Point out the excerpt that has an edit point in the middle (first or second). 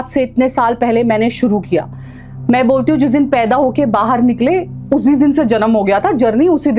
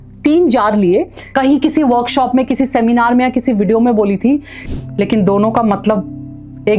second